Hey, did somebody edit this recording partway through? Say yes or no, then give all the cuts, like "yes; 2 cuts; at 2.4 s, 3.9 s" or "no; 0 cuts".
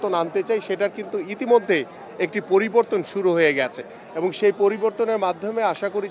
no; 0 cuts